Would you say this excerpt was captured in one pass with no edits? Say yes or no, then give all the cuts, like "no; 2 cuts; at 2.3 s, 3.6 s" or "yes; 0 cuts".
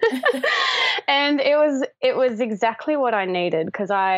yes; 0 cuts